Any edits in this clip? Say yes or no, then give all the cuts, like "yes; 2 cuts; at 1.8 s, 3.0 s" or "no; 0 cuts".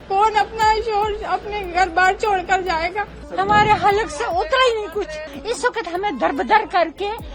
yes; 2 cuts; at 3.2 s, 5.3 s